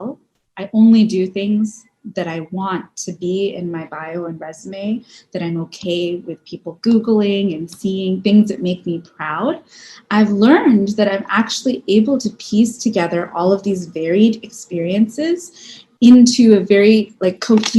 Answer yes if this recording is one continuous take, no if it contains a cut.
yes